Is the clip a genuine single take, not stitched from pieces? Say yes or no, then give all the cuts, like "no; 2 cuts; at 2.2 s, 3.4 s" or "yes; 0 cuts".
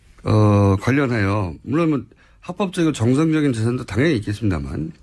no; 1 cut; at 4.1 s